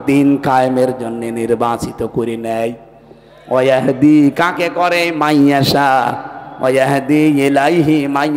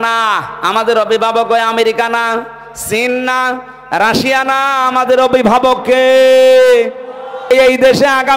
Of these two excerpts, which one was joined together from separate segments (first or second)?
second